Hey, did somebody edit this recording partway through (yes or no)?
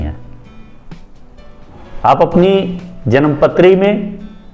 no